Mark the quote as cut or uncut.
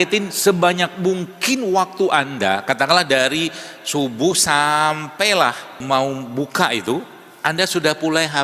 cut